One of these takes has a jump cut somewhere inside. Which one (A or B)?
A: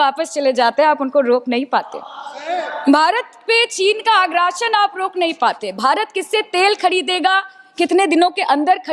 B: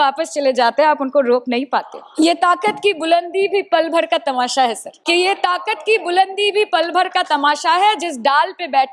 B